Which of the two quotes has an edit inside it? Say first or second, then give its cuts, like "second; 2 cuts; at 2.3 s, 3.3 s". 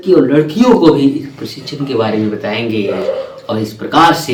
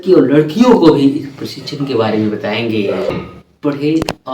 second; 1 cut; at 3.1 s